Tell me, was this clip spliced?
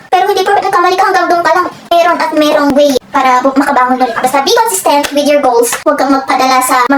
yes; 1 cut; at 2.7 s

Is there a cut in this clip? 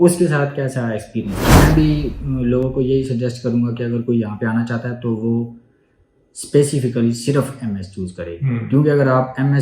yes; 1 cut; at 1.5 s

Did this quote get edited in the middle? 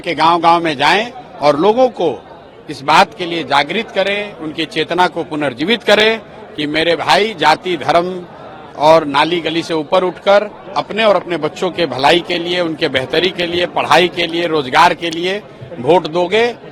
no; 0 cuts

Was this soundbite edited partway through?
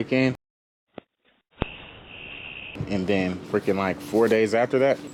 no; 0 cuts

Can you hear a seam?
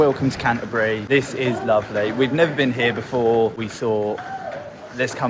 yes; 2 cuts; at 1.0 s, 3.6 s

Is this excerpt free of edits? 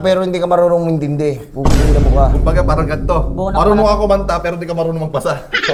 yes; 0 cuts

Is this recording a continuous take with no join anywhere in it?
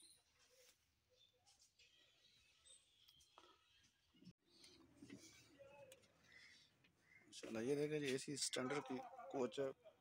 yes; 0 cuts

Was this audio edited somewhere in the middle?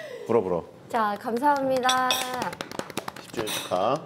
no; 0 cuts

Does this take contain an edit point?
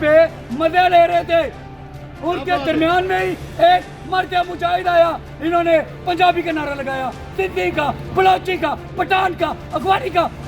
no; 0 cuts

